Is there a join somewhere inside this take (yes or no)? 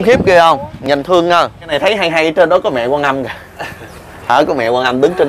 yes